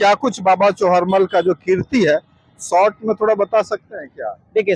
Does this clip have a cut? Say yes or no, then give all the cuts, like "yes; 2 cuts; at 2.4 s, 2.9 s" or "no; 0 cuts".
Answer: no; 0 cuts